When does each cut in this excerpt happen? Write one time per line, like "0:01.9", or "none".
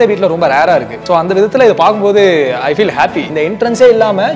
0:00.9
0:03.3